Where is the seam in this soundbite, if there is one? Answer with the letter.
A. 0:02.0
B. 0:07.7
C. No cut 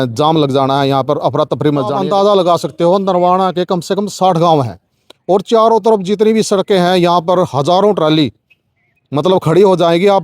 A